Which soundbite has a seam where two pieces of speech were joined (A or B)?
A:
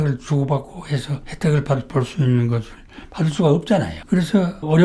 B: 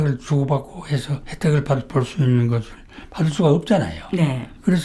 A